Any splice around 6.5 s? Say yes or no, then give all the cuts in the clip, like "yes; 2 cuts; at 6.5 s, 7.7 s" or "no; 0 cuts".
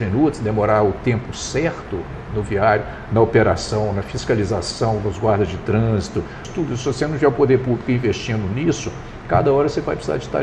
yes; 1 cut; at 6.5 s